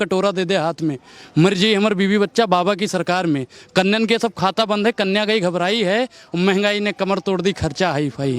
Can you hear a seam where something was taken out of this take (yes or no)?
no